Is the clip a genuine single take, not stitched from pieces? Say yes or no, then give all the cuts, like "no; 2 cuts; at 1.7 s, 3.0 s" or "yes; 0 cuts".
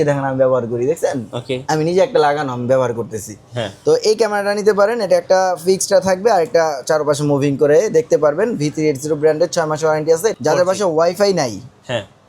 no; 2 cuts; at 1.5 s, 10.3 s